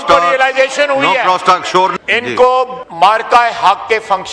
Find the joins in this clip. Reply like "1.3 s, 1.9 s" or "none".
1.9 s, 2.8 s